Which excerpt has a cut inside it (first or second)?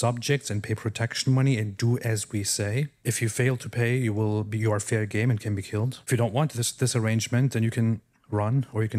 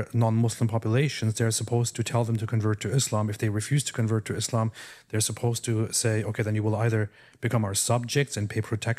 first